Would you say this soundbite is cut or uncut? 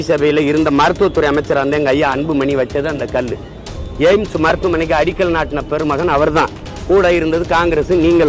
uncut